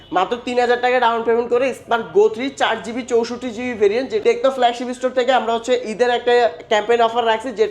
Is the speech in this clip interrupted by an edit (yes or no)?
yes